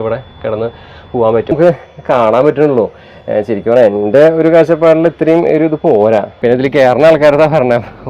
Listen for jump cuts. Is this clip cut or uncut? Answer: cut